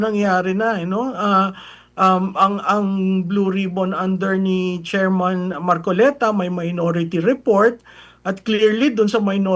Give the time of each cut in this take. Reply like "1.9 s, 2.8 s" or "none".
none

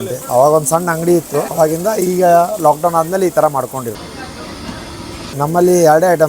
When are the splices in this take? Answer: 4.0 s, 5.3 s

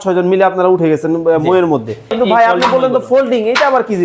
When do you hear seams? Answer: 2.1 s

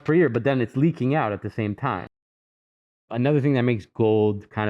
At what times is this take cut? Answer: 2.4 s

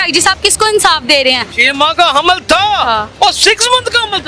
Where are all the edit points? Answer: 1.6 s, 3.1 s

